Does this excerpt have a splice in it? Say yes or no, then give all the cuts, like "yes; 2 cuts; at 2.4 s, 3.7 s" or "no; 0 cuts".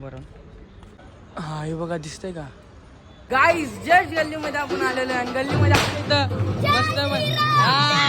yes; 1 cut; at 3.3 s